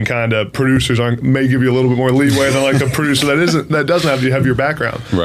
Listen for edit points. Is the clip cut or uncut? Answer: uncut